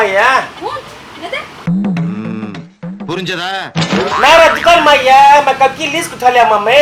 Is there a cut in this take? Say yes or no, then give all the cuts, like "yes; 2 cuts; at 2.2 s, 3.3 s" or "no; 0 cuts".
no; 0 cuts